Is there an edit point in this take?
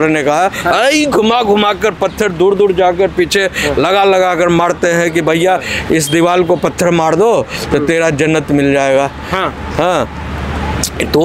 no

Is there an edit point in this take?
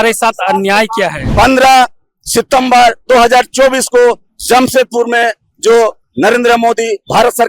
yes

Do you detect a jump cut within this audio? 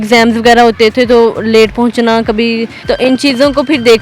yes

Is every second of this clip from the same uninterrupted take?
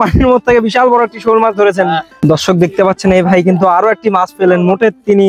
no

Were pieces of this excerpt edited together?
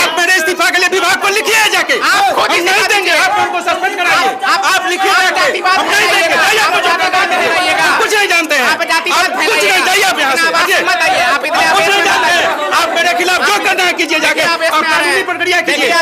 no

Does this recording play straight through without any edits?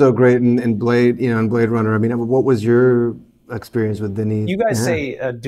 no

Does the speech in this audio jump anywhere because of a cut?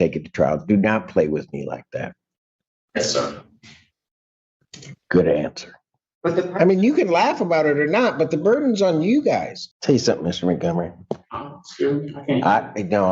yes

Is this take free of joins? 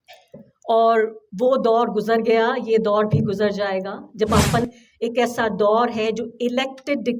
no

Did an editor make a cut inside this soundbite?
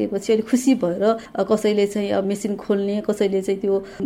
yes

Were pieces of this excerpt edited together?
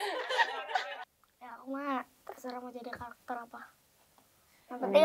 yes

